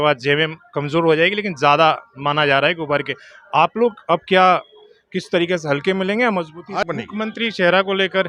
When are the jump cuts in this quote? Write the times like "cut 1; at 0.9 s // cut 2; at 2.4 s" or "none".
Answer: cut 1; at 6.8 s